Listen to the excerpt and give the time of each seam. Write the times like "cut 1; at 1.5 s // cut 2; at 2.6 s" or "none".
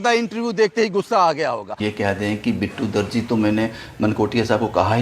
cut 1; at 1.8 s